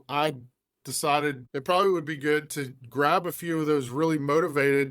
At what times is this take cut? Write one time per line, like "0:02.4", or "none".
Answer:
0:01.4